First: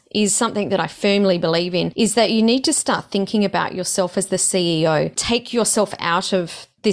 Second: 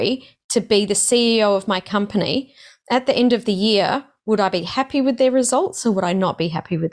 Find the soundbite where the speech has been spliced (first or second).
first